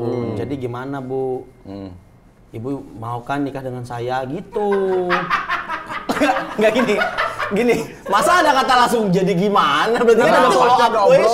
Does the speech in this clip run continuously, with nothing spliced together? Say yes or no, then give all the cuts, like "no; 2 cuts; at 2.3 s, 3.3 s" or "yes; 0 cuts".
yes; 0 cuts